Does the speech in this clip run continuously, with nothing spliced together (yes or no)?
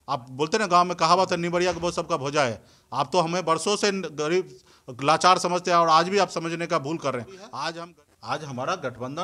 no